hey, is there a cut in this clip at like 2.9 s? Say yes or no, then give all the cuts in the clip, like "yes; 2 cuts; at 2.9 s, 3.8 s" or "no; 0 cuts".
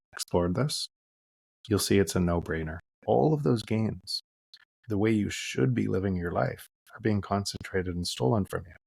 yes; 1 cut; at 2.9 s